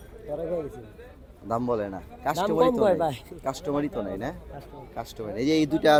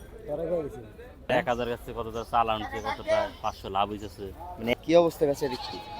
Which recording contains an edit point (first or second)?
second